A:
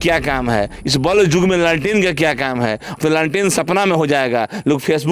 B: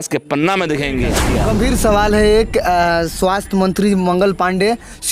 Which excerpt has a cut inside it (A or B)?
B